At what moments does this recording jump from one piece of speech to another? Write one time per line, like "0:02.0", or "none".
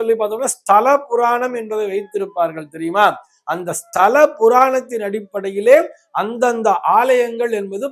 none